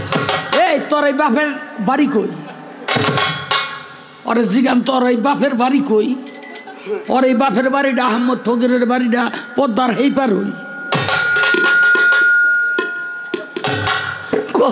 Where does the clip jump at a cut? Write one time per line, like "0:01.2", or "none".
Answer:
0:13.6